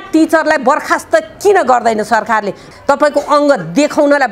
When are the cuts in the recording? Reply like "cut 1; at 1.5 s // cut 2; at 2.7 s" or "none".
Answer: cut 1; at 2.6 s

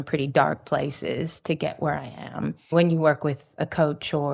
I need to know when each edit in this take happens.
cut 1; at 2.7 s

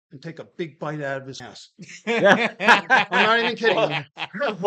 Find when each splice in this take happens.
cut 1; at 1.4 s

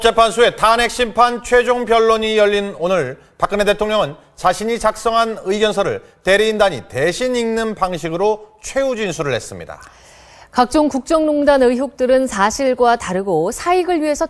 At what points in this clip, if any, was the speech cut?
none

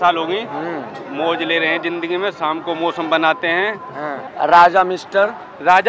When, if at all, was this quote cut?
cut 1; at 4.2 s

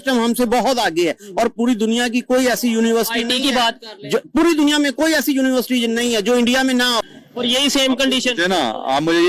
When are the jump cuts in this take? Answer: cut 1; at 7.0 s

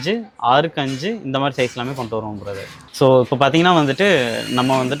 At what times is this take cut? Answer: none

